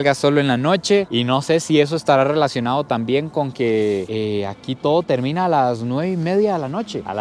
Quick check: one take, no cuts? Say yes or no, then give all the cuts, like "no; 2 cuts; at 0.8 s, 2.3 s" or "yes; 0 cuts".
yes; 0 cuts